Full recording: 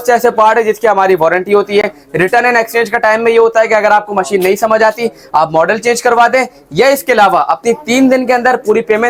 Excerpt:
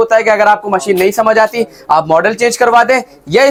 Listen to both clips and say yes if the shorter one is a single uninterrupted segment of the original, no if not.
yes